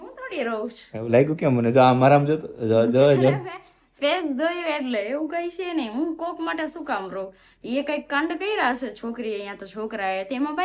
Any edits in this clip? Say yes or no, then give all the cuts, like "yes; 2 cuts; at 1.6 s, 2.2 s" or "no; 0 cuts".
no; 0 cuts